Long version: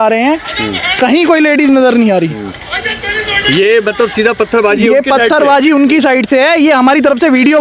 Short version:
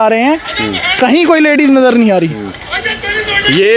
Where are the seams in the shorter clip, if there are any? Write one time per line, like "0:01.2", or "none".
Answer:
none